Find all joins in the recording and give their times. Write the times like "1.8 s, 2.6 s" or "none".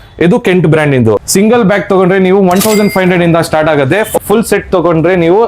1.2 s, 4.2 s